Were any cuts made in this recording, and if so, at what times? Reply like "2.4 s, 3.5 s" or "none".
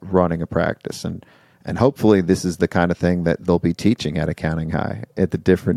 none

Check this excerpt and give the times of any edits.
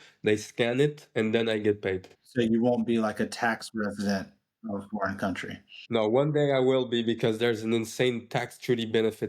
2.2 s, 5.7 s

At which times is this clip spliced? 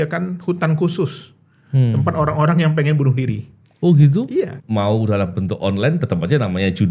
4.6 s

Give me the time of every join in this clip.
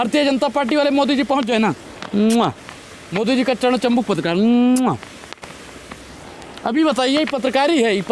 none

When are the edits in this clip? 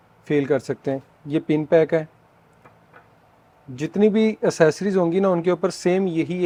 none

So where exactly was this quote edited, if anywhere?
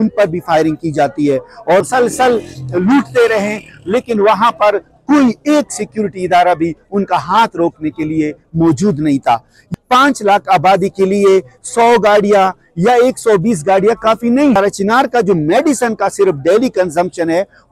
1.9 s, 9.7 s, 14.6 s

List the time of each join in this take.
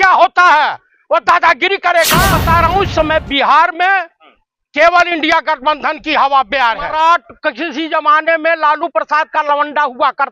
2.3 s, 6.9 s

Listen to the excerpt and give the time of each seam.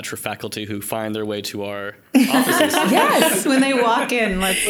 none

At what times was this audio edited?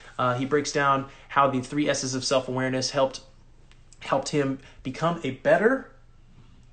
none

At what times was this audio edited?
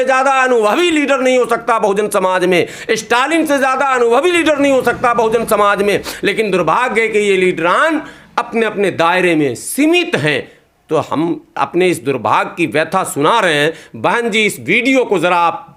none

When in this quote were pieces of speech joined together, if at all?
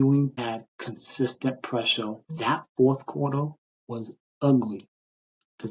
2.2 s

